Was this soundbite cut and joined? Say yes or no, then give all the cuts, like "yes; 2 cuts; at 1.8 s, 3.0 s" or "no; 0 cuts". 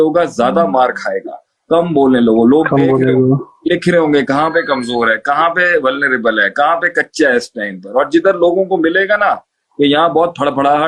no; 0 cuts